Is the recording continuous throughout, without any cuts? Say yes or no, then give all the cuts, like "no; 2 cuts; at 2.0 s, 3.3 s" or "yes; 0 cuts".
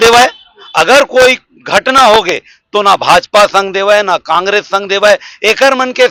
yes; 0 cuts